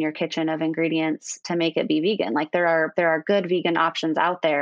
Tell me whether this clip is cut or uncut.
uncut